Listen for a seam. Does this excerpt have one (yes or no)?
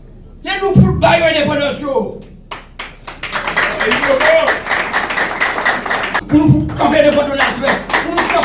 yes